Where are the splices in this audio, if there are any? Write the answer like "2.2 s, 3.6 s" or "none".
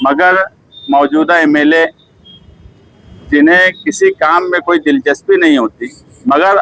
none